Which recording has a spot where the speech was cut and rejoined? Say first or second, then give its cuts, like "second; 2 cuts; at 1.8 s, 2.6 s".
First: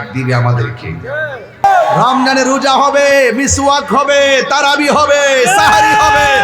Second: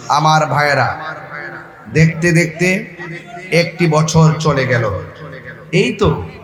first; 1 cut; at 1.6 s